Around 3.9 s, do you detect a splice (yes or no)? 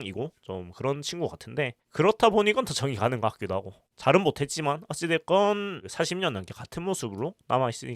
yes